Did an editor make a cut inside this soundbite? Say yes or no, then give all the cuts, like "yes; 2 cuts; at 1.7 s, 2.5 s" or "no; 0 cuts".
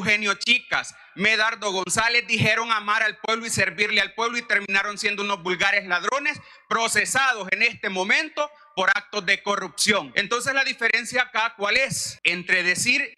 yes; 2 cuts; at 10.2 s, 12.1 s